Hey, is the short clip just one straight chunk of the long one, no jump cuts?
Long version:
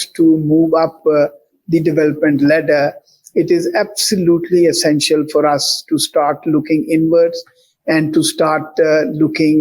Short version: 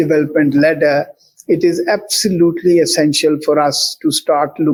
yes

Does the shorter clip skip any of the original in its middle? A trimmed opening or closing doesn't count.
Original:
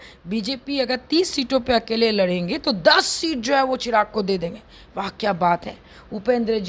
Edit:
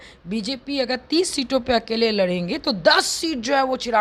no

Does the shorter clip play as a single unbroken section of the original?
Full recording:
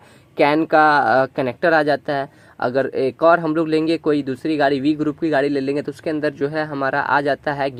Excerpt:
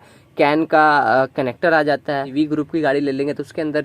no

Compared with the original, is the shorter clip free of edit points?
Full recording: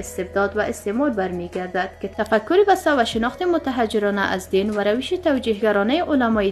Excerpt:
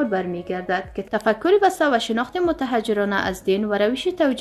yes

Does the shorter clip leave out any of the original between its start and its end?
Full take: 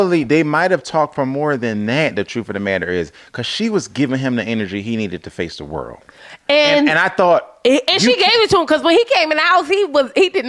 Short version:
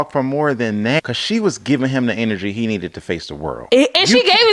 yes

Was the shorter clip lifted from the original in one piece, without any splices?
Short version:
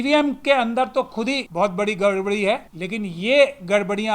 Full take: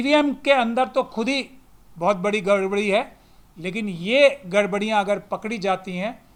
no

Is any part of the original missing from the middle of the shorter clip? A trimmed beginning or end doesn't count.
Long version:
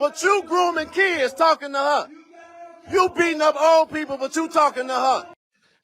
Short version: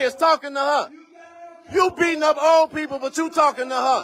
no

